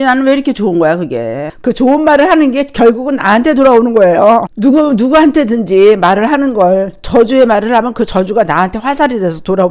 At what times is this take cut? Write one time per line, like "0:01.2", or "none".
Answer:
0:01.5